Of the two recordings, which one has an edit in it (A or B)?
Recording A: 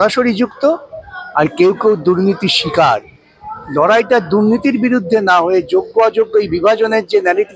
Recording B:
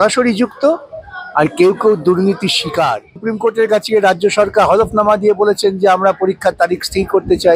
B